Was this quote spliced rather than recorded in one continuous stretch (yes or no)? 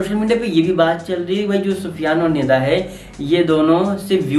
no